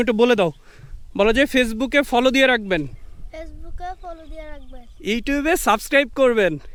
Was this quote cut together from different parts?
no; 0 cuts

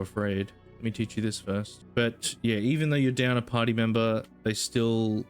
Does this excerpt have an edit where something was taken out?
yes; 1 cut; at 1.8 s

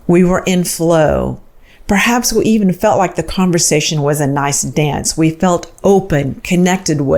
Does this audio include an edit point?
no; 0 cuts

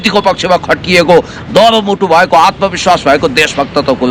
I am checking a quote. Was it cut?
no; 0 cuts

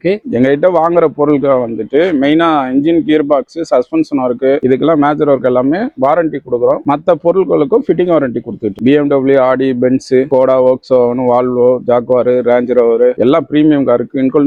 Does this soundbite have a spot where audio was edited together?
no; 0 cuts

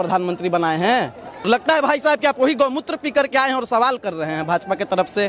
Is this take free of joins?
no; 1 cut; at 1.5 s

